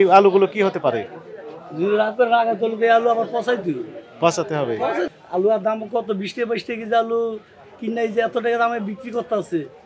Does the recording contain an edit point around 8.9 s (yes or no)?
no